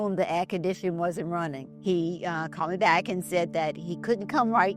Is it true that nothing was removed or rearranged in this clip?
no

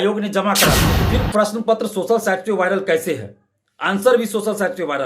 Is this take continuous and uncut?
no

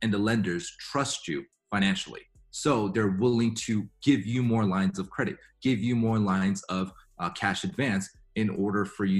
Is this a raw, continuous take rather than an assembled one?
yes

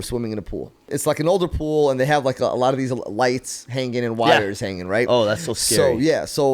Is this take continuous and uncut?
no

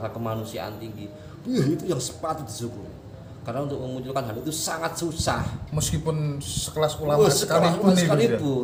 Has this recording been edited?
no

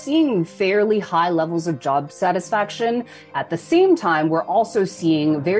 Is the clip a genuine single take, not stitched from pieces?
no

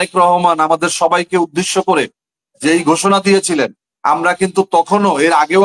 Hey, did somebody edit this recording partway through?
no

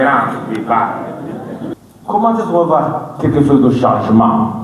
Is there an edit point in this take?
yes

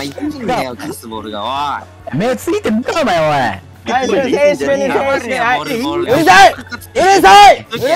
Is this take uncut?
yes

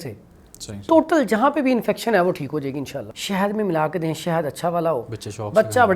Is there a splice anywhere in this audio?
yes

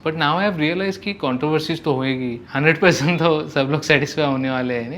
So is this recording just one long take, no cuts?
no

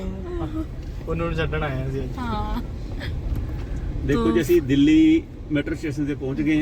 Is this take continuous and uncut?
yes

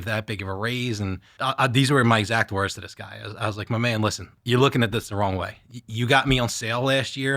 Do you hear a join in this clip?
yes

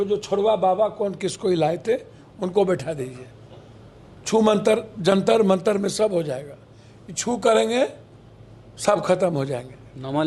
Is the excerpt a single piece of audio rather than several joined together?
yes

